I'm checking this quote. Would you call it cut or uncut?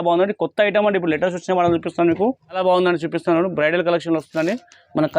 cut